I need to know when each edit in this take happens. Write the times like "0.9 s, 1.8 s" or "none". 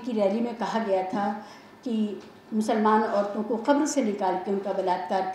none